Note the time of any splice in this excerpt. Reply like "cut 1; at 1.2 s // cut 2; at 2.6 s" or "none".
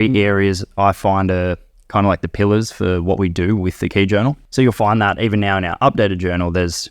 cut 1; at 4.4 s